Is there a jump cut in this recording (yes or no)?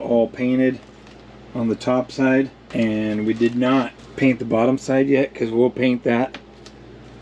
yes